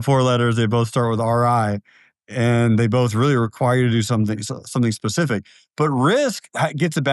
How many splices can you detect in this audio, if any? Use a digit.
0